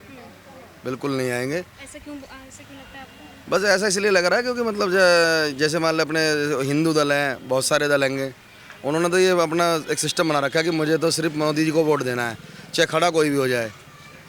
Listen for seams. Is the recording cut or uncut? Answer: uncut